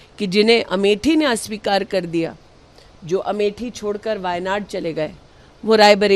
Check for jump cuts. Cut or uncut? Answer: uncut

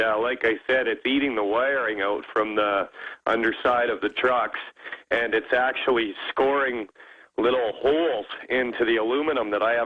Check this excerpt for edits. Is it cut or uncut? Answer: cut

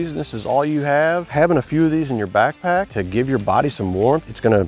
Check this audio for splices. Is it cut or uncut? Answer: uncut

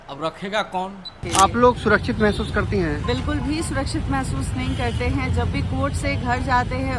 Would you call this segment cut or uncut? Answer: cut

